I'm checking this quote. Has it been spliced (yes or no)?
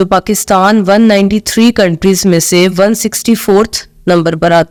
no